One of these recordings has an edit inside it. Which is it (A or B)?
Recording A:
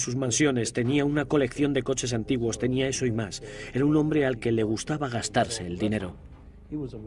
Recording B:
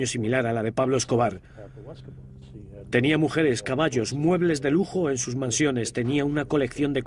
B